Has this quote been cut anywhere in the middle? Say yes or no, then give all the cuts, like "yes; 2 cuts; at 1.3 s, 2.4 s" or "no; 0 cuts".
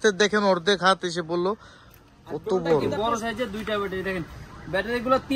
yes; 1 cut; at 2.9 s